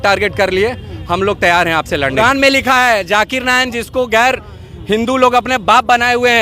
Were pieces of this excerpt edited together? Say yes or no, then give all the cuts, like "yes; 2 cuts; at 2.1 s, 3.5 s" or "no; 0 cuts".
yes; 1 cut; at 2.3 s